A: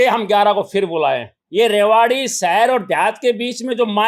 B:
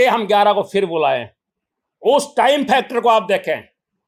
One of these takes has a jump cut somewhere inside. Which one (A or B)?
A